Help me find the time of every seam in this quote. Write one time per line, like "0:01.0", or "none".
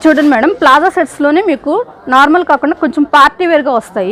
none